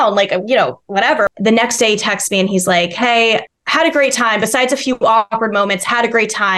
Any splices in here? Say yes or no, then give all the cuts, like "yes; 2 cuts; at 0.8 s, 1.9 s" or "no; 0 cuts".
yes; 2 cuts; at 1.3 s, 3.6 s